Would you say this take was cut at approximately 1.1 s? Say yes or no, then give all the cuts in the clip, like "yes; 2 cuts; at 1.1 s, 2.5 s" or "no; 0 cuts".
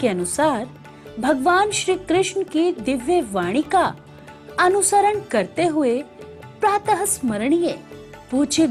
no; 1 cut; at 3.9 s